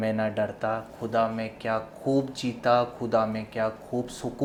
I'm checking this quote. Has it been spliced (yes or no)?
no